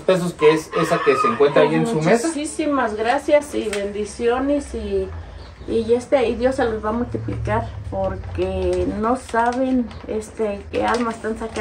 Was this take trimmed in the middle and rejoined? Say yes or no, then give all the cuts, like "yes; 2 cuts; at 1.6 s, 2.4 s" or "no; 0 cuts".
no; 0 cuts